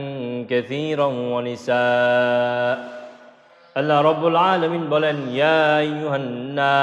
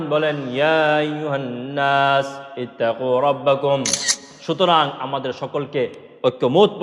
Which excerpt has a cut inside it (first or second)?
second